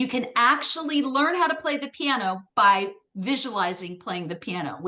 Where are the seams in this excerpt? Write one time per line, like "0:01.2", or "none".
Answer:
none